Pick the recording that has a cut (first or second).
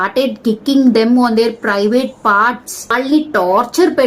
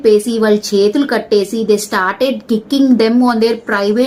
first